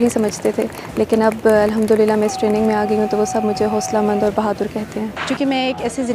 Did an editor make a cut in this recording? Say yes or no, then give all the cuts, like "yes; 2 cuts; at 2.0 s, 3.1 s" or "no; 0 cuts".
yes; 1 cut; at 5.1 s